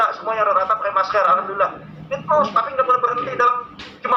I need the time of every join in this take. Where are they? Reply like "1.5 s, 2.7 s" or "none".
none